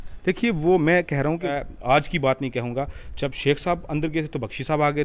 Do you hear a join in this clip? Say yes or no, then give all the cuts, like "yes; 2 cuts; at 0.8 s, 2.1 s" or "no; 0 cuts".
yes; 1 cut; at 1.5 s